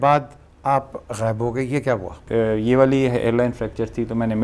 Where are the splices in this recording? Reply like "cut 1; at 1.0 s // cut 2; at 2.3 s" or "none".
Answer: cut 1; at 2.2 s